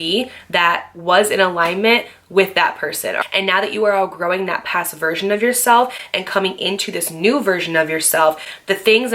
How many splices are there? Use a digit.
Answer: 1